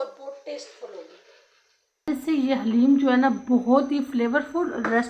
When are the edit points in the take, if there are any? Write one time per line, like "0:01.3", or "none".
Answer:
0:02.1